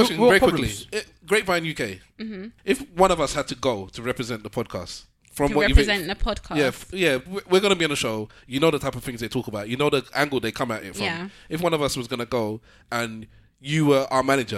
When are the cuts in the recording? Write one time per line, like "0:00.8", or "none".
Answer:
0:02.5